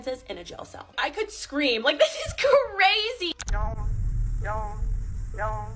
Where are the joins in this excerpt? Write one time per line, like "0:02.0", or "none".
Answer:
0:03.4